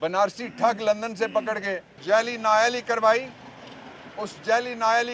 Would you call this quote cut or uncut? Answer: cut